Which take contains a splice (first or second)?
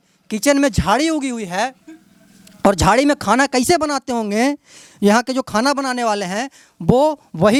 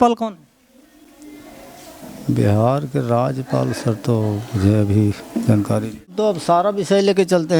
second